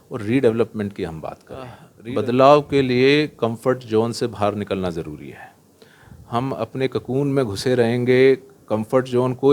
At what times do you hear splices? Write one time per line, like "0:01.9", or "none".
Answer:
0:01.9

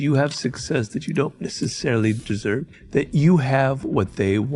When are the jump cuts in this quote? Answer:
0:02.4

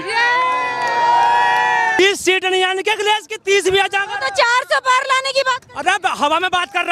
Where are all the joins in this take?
0:02.0

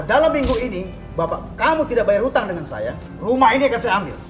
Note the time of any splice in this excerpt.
0:03.1

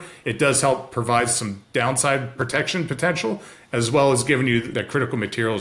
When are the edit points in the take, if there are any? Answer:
0:02.4
0:04.7

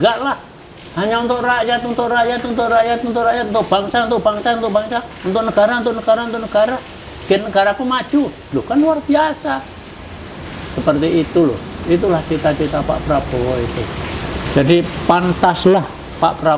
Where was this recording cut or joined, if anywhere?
none

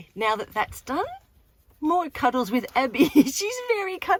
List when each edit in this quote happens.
none

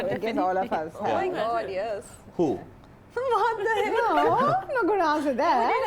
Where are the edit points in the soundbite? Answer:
none

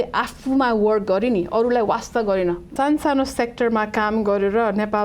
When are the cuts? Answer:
0:02.7

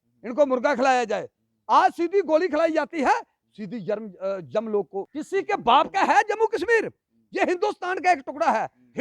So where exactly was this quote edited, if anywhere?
0:05.1

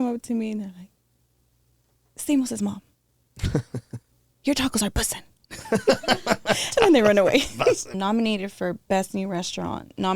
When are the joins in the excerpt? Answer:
0:08.0

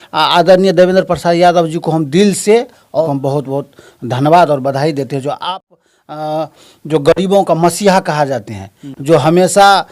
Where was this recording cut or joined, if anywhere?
0:03.0

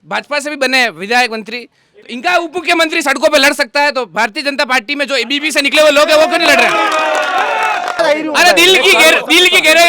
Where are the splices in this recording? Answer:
0:08.0

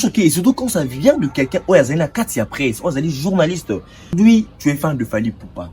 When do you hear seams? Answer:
0:04.1

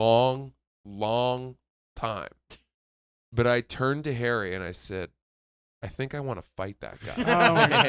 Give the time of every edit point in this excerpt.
none

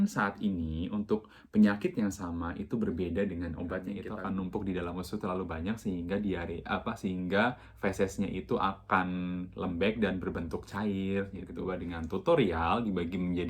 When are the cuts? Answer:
0:04.1
0:11.9

